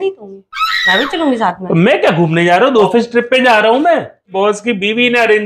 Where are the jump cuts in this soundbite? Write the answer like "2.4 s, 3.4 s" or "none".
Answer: 2.9 s, 4.3 s